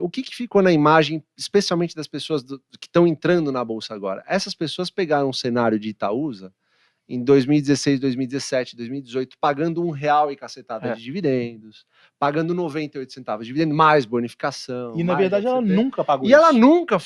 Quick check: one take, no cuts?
yes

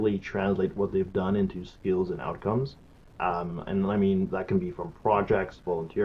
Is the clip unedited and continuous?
yes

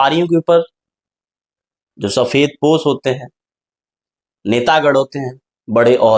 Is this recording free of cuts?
yes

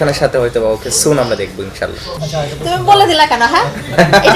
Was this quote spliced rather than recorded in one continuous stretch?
yes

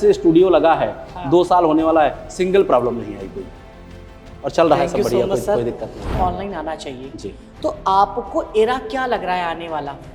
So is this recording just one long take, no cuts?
no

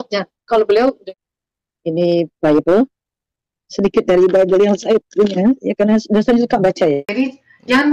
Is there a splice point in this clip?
yes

